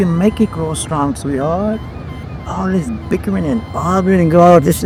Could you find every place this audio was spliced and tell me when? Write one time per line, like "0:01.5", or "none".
none